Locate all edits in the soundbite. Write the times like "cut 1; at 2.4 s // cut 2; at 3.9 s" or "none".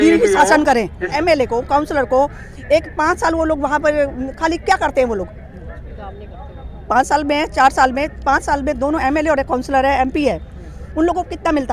cut 1; at 1.1 s